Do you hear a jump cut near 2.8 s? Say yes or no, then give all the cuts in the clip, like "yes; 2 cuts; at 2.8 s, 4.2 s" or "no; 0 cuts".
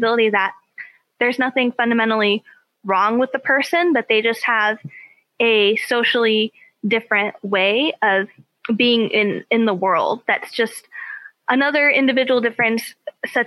no; 0 cuts